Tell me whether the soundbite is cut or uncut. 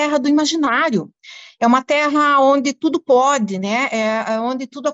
uncut